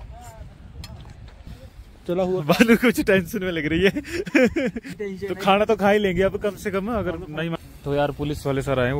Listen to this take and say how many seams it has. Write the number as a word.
three